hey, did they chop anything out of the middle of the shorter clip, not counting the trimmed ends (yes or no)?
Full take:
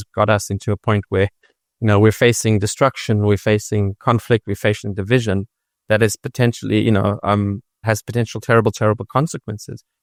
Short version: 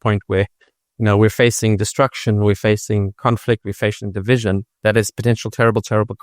yes